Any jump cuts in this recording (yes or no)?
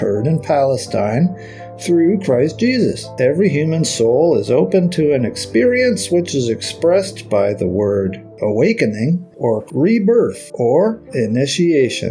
yes